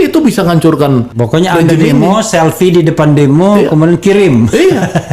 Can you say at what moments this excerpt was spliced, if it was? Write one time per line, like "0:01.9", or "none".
0:01.1